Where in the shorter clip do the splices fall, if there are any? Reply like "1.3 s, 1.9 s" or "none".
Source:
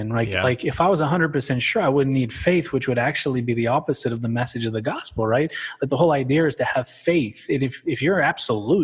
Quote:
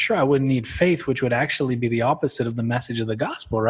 none